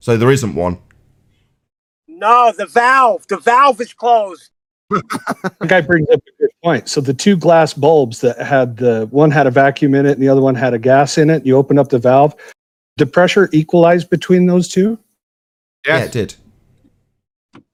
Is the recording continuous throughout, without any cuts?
yes; 0 cuts

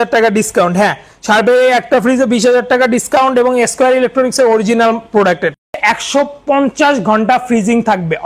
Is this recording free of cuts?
no; 1 cut; at 5.8 s

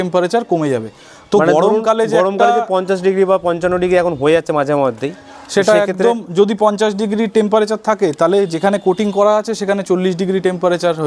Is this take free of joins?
yes; 0 cuts

